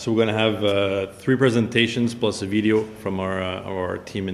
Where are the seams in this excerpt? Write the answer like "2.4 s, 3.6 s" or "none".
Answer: none